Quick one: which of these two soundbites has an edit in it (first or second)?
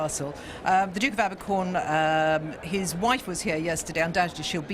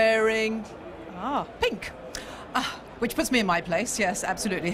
first